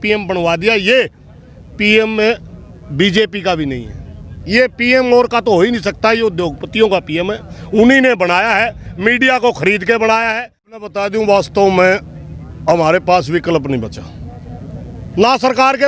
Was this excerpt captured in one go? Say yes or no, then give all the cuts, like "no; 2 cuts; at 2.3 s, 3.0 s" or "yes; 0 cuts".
no; 1 cut; at 10.9 s